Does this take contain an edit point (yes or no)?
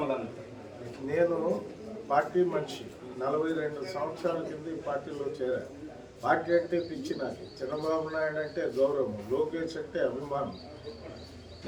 no